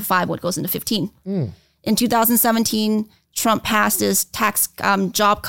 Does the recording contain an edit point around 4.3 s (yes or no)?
no